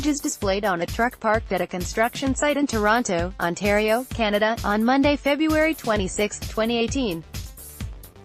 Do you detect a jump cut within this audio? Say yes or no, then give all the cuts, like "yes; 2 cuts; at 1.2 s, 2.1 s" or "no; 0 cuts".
yes; 1 cut; at 7.3 s